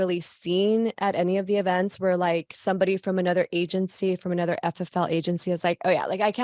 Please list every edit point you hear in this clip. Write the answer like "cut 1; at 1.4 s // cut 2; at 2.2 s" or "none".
none